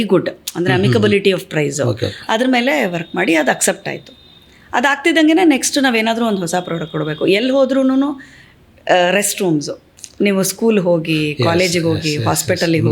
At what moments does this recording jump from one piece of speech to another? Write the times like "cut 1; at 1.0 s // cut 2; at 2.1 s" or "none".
none